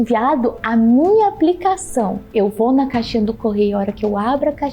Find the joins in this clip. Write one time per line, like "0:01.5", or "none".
0:02.2